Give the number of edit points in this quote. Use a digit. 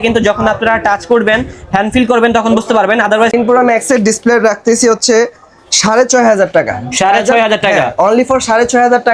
1